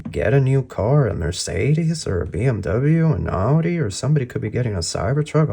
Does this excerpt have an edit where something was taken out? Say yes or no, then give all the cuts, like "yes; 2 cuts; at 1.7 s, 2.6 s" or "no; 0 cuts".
no; 0 cuts